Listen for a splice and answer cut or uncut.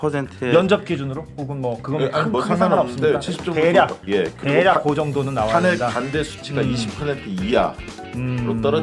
uncut